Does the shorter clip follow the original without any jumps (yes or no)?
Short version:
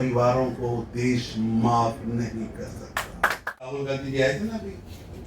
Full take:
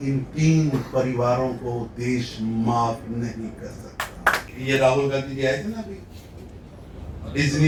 no